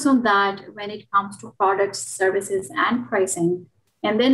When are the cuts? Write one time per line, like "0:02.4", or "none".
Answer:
none